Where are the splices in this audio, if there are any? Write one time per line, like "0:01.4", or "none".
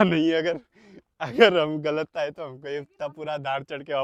none